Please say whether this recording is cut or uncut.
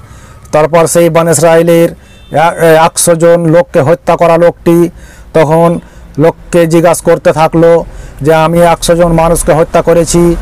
uncut